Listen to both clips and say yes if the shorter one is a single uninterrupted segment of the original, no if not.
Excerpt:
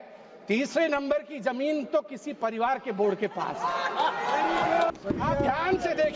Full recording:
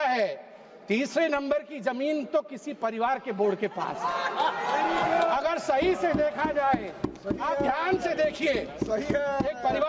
no